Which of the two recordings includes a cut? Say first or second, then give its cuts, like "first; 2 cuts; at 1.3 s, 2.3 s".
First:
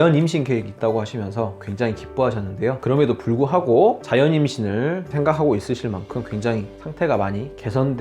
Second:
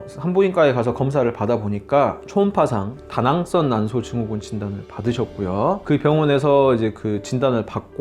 first; 1 cut; at 2.8 s